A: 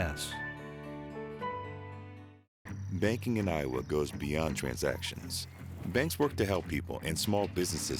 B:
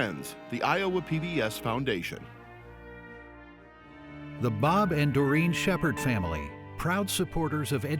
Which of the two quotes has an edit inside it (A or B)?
B